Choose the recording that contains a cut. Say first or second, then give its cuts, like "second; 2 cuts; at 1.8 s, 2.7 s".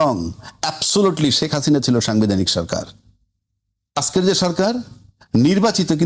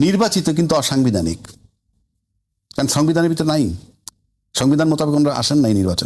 first; 1 cut; at 4.0 s